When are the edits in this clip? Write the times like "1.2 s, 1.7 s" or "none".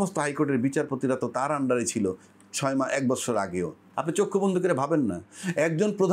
3.8 s

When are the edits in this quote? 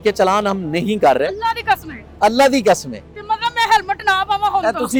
none

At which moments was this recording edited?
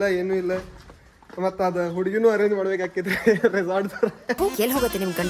1.1 s, 4.4 s

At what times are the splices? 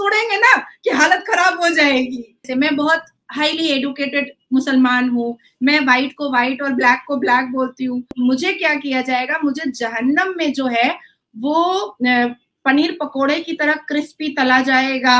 2.4 s, 8.1 s

